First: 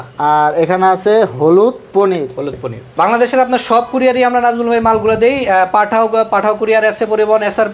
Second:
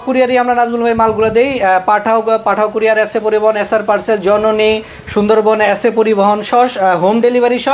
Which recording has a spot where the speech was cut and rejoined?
first; 1 cut; at 2.8 s

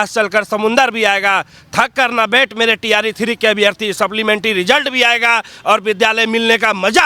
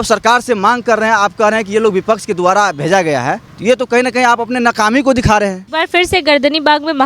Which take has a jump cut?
second; 2 cuts; at 3.5 s, 5.6 s

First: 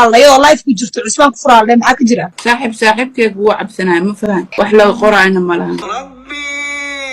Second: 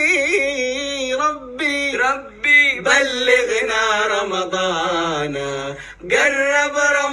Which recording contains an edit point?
first; 3 cuts; at 2.3 s, 4.5 s, 5.9 s

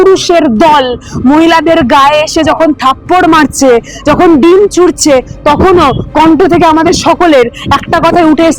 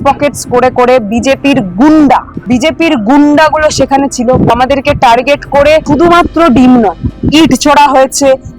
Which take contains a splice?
second; 3 cuts; at 2.3 s, 4.5 s, 5.8 s

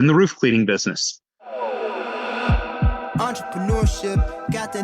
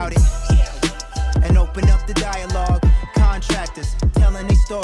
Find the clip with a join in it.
first; 1 cut; at 1.5 s

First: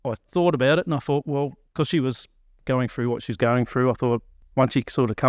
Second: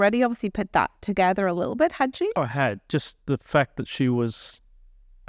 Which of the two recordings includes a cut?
first; 1 cut; at 4.4 s

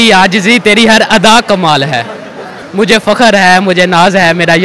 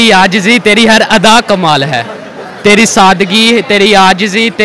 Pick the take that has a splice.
first; 1 cut; at 2.5 s

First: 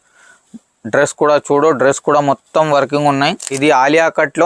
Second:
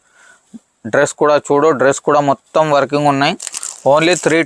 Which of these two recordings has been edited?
first; 1 cut; at 3.5 s

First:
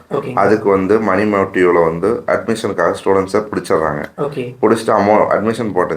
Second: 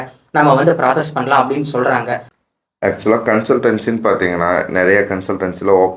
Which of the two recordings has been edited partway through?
second; 1 cut; at 2.3 s

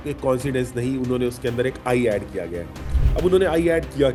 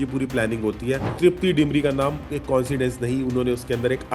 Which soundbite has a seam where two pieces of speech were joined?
second; 1 cut; at 1.1 s

